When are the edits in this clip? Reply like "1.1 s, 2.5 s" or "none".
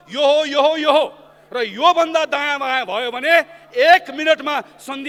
none